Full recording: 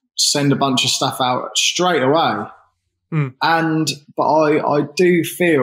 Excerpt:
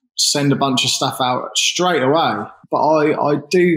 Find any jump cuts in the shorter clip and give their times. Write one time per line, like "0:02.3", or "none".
0:02.6